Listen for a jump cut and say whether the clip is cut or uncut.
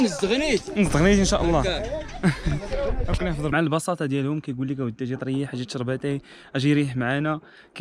uncut